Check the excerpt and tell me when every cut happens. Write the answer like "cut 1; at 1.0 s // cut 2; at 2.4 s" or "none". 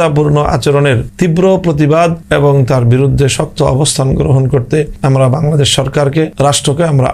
cut 1; at 1.0 s // cut 2; at 2.2 s // cut 3; at 4.9 s // cut 4; at 6.3 s

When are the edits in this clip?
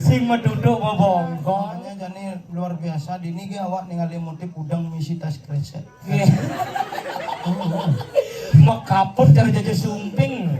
cut 1; at 2.3 s

